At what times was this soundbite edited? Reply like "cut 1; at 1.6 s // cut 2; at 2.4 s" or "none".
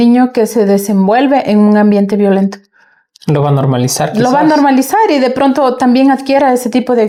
none